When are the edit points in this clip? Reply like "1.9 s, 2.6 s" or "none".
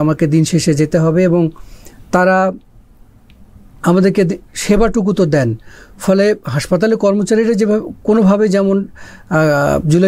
none